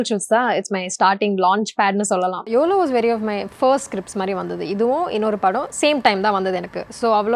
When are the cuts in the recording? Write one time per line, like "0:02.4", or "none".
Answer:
0:02.5